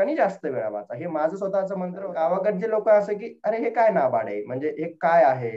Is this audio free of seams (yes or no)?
no